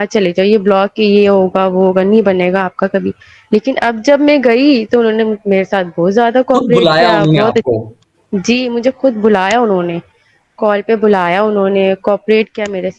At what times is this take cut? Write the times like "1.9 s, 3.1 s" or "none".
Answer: none